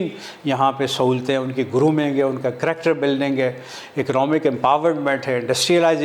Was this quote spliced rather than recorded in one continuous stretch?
no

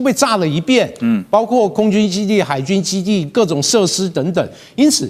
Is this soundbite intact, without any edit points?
yes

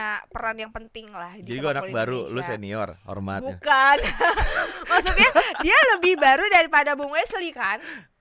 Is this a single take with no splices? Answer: yes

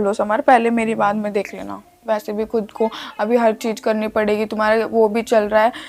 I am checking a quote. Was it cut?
no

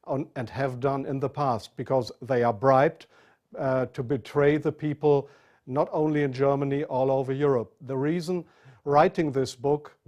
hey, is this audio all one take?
no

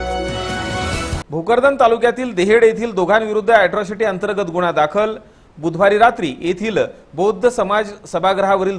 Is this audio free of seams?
no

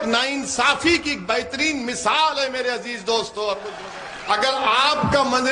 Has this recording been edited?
yes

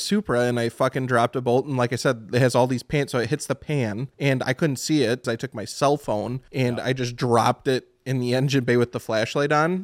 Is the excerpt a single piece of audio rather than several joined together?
no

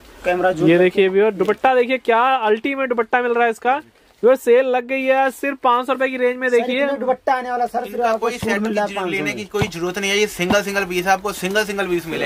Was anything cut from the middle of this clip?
no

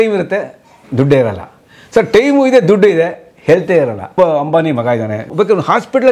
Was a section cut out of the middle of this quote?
yes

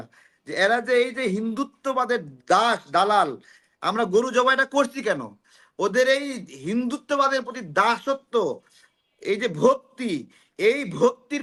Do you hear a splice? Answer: no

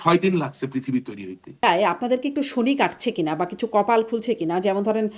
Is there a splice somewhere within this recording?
yes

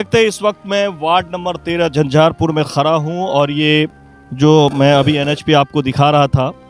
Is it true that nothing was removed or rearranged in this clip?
yes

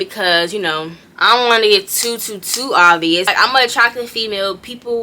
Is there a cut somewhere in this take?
yes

